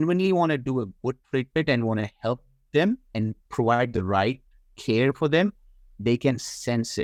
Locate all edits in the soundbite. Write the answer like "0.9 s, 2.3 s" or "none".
none